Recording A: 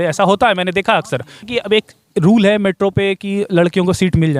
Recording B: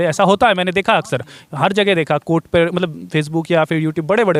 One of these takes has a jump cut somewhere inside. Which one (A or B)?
A